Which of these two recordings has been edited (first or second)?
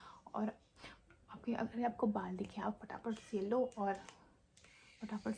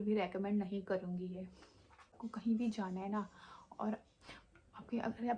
second